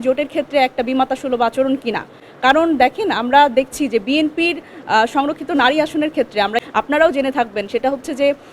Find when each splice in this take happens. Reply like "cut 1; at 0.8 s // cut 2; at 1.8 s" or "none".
cut 1; at 6.6 s